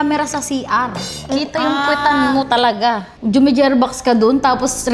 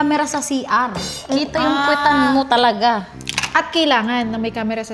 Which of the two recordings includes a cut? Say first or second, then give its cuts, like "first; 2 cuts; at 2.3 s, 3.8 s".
first; 1 cut; at 3.1 s